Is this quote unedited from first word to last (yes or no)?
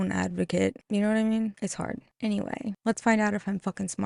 yes